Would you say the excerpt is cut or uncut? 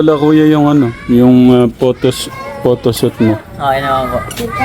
uncut